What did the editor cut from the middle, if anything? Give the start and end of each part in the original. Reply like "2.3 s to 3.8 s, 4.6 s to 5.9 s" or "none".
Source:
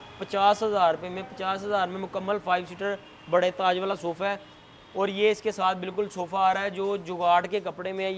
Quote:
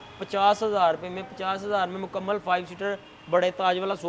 none